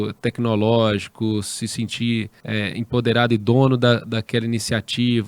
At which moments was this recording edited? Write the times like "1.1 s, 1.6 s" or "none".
2.4 s